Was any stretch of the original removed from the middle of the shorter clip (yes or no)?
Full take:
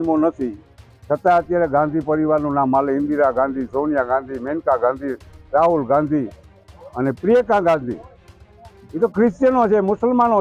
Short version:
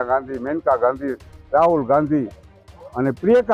no